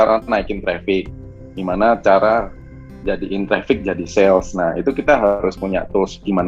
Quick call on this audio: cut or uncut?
uncut